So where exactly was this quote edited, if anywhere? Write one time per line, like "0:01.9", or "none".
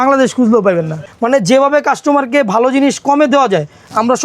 0:01.0